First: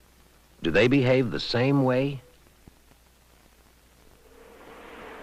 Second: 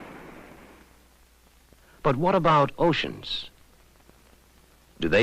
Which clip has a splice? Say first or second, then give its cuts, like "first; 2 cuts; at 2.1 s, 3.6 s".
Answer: second; 1 cut; at 2.8 s